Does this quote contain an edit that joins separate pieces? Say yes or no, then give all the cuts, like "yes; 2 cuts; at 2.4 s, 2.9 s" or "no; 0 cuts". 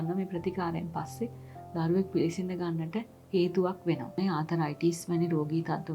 yes; 1 cut; at 4.2 s